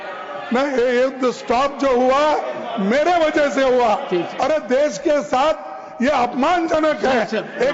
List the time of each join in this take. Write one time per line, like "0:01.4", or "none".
none